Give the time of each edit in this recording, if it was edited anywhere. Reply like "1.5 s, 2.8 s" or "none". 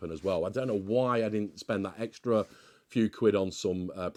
none